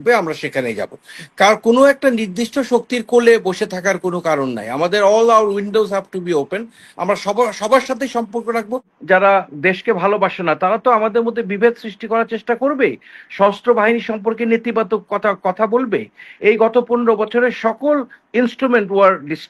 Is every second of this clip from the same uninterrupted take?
no; 1 cut; at 8.9 s

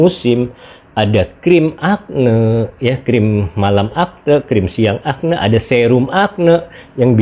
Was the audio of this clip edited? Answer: no; 0 cuts

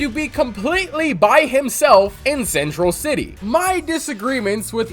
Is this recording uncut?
no; 1 cut; at 3.3 s

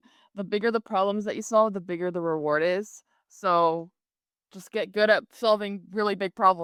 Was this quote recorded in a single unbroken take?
yes; 0 cuts

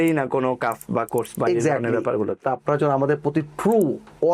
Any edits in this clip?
yes; 1 cut; at 2.4 s

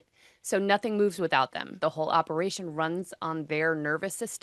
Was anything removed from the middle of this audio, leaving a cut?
yes; 1 cut; at 1.7 s

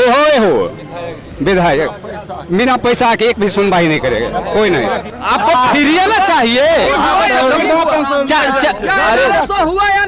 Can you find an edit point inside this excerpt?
yes; 1 cut; at 5.1 s

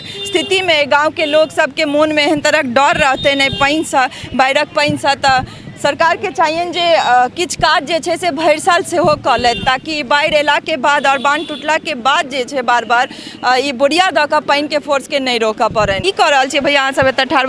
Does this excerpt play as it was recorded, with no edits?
no; 1 cut; at 16.0 s

